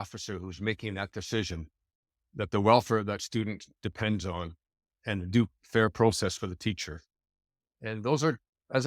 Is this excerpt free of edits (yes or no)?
yes